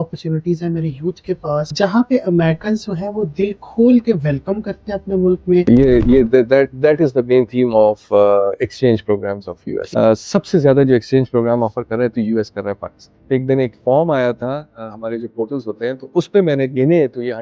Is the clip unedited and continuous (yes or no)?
no